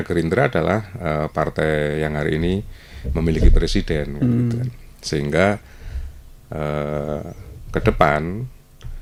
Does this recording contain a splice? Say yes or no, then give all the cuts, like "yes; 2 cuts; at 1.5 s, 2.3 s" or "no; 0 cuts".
no; 0 cuts